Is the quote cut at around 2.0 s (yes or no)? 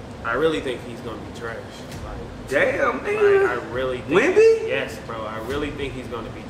yes